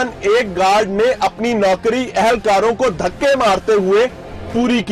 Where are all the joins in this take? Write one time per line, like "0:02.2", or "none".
none

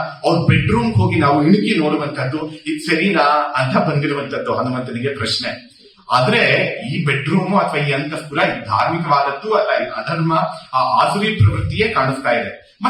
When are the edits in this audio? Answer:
none

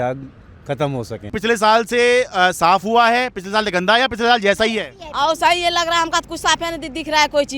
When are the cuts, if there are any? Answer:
0:01.3

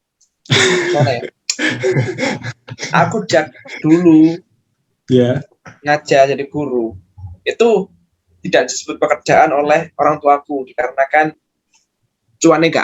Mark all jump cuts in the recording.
none

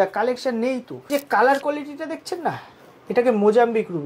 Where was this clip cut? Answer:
0:01.0

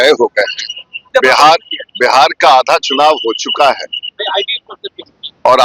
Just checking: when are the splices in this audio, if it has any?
0:01.0

